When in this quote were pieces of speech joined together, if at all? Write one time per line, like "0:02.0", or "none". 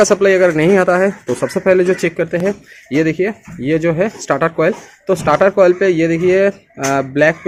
none